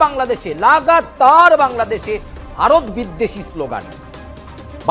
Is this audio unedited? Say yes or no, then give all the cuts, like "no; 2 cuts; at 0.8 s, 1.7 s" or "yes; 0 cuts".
yes; 0 cuts